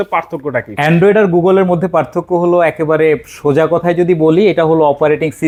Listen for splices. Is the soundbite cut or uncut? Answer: uncut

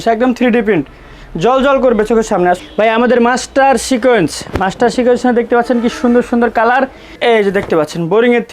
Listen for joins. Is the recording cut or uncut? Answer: cut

